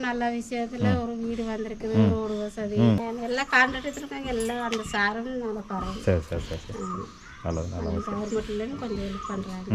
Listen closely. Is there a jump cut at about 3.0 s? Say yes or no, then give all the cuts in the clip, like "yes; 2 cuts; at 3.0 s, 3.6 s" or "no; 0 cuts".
yes; 1 cut; at 3.0 s